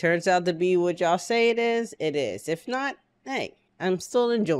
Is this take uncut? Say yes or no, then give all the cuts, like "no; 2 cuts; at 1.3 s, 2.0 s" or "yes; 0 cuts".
no; 1 cut; at 3.6 s